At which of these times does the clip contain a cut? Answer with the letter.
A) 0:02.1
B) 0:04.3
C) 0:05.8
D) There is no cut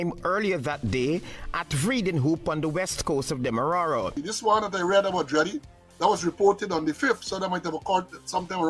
B